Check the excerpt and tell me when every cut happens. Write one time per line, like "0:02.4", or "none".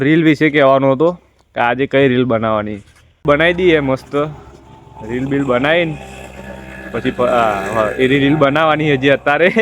0:03.2

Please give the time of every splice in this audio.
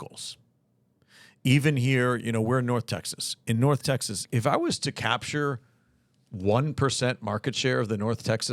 0:04.2

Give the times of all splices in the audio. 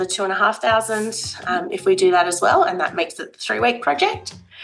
none

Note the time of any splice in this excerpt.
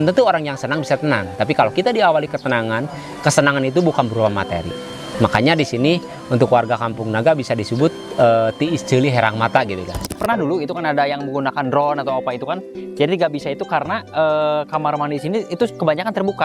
0:10.1

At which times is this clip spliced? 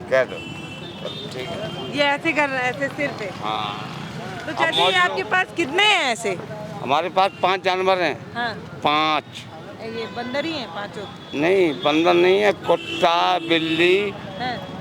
none

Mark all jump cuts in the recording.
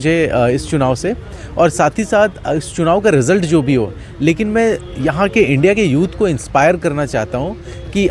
none

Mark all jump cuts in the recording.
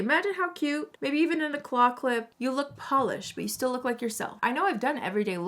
0:00.9
0:02.3
0:04.3

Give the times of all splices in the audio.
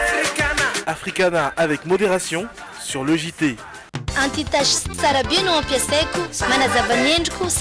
0:03.9

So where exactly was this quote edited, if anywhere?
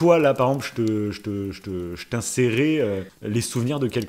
0:03.1

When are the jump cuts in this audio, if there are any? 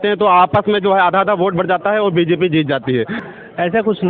0:03.2

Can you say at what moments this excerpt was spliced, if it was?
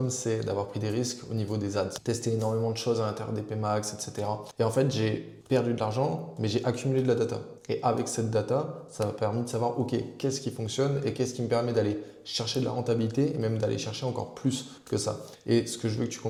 none

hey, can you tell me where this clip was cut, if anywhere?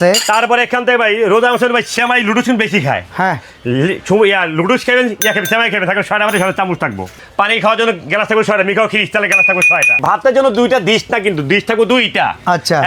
0:07.1
0:10.0

